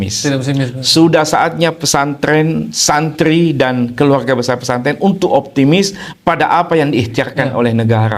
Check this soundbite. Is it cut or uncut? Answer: uncut